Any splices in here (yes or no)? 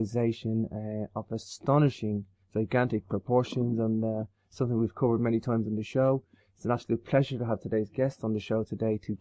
yes